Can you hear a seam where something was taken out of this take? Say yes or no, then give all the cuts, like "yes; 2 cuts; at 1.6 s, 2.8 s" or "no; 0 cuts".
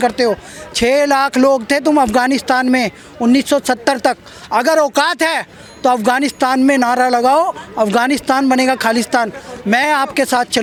no; 0 cuts